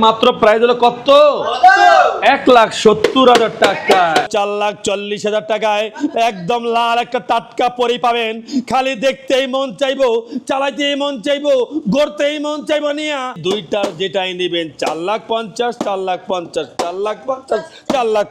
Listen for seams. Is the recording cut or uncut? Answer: cut